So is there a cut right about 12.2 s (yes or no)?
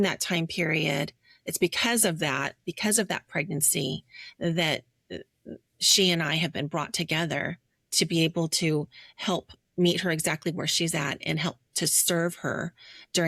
no